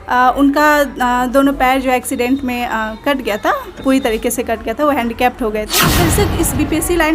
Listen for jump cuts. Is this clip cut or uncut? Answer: cut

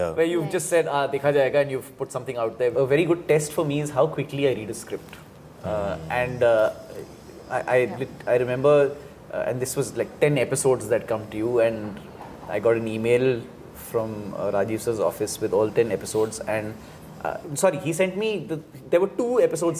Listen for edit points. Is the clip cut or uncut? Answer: cut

